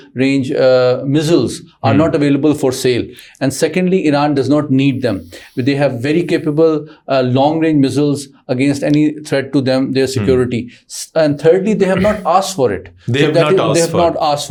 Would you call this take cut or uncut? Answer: uncut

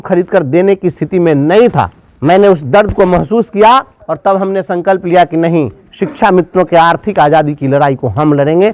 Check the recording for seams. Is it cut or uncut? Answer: cut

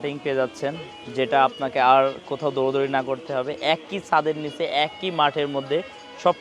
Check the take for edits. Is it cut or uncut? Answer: uncut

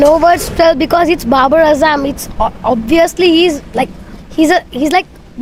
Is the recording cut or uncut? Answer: uncut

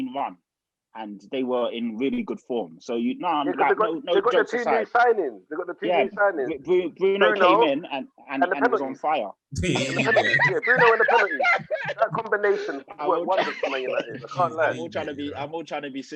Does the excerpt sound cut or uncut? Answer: uncut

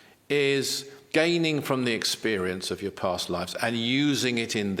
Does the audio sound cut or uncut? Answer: cut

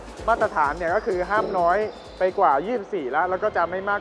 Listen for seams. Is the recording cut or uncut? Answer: uncut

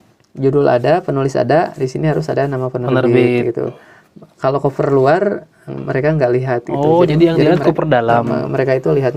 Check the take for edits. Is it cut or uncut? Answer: uncut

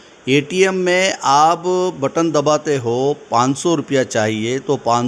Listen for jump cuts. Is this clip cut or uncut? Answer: uncut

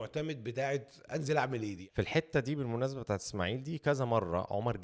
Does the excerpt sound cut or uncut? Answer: cut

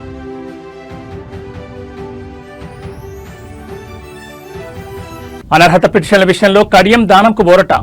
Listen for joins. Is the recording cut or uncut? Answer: cut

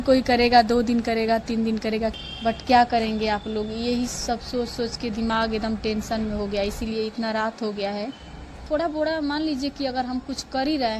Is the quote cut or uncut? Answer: cut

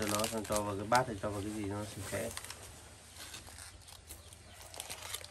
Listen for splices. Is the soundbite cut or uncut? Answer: uncut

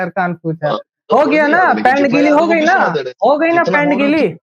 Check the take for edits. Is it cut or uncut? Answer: cut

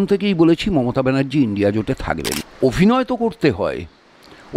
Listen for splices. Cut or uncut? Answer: cut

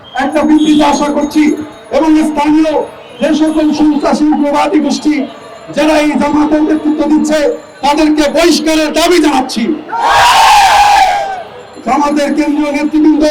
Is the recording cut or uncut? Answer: uncut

